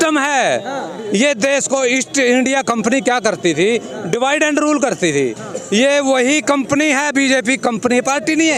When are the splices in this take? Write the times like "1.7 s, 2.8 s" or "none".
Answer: none